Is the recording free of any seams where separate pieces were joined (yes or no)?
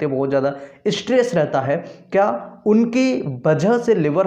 yes